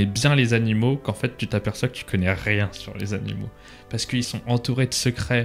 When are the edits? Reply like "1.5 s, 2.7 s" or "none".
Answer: 4.4 s